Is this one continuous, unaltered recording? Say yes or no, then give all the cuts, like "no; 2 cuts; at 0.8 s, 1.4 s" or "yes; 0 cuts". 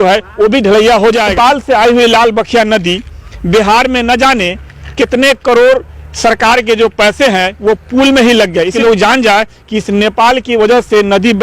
no; 2 cuts; at 1.3 s, 8.7 s